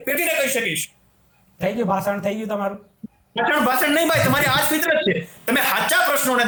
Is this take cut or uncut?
uncut